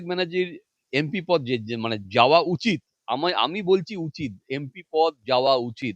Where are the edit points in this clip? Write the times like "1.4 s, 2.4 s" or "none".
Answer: none